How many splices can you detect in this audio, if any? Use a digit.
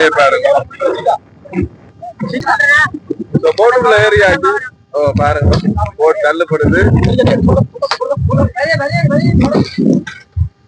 0